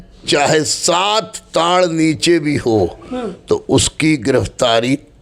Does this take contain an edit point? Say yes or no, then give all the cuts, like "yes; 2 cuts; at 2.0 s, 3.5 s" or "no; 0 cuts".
no; 0 cuts